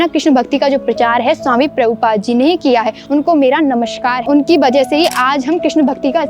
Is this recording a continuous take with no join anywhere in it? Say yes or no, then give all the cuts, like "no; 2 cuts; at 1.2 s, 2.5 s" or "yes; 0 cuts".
yes; 0 cuts